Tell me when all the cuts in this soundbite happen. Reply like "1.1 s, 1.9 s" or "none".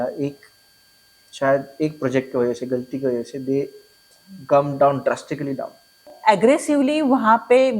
6.1 s